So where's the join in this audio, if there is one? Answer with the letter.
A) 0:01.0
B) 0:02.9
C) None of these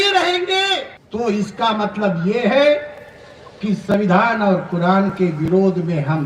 A